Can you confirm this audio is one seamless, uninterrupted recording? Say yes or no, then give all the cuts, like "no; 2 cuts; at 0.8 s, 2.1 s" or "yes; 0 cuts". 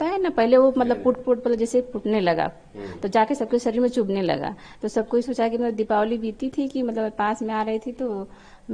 yes; 0 cuts